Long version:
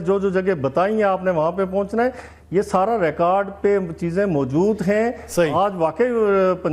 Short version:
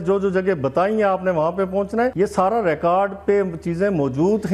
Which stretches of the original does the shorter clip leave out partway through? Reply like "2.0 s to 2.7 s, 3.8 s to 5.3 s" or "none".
2.1 s to 2.5 s